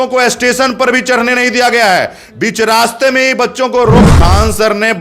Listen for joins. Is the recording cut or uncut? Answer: cut